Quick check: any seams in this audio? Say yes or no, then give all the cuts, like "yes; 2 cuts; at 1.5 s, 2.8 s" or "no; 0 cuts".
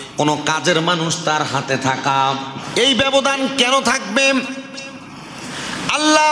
yes; 1 cut; at 2.5 s